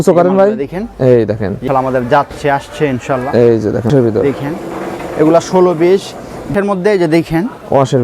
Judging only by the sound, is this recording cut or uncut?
cut